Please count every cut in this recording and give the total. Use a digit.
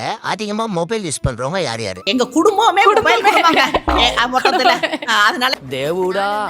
1